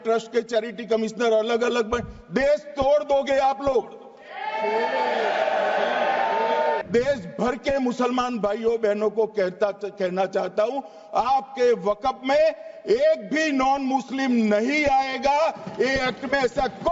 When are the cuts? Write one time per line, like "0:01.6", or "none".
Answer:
0:06.8